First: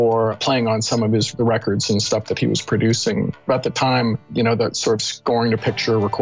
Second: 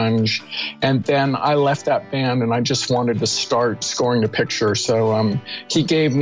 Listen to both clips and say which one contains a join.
first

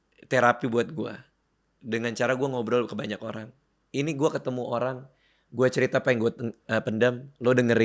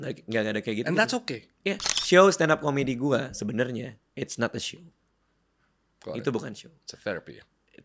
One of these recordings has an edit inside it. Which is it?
second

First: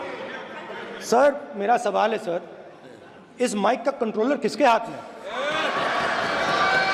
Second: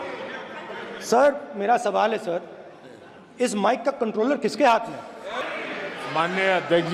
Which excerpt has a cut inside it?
second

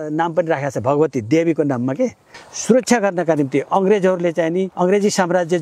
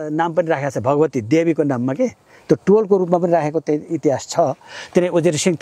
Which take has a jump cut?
first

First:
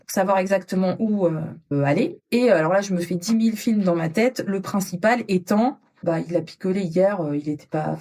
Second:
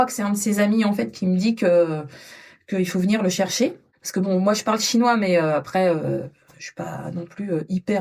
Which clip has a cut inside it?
first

